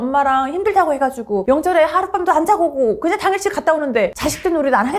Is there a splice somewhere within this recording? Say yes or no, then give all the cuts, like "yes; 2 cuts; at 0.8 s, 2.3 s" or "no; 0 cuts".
no; 0 cuts